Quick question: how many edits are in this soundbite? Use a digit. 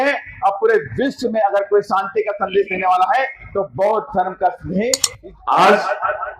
1